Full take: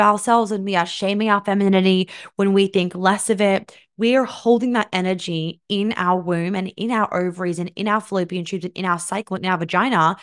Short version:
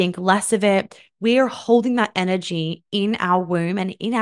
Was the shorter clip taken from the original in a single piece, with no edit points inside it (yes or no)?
yes